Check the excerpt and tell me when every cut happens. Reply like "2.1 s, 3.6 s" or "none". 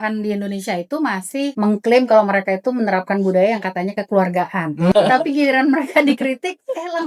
1.5 s, 4.9 s

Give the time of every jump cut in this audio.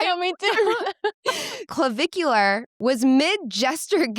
1.7 s

